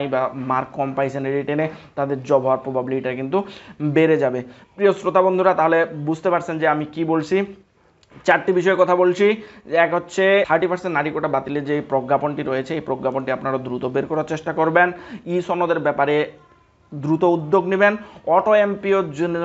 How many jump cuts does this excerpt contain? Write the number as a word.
zero